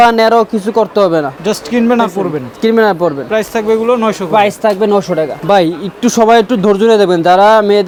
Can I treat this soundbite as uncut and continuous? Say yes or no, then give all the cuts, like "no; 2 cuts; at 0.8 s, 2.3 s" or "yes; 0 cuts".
yes; 0 cuts